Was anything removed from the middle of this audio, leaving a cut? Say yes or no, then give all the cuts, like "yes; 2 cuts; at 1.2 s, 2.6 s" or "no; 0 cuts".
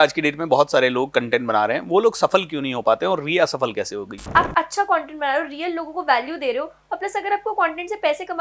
yes; 1 cut; at 4.2 s